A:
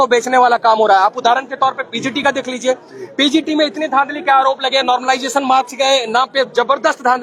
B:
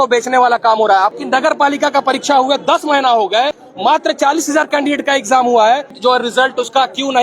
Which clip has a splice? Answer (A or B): B